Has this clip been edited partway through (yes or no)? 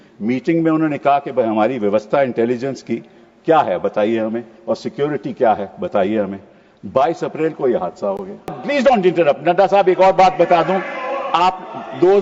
yes